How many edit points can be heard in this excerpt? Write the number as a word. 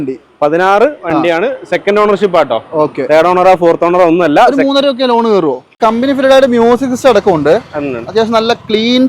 one